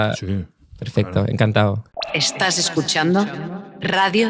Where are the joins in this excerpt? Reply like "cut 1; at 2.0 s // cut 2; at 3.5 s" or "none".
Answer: cut 1; at 1.9 s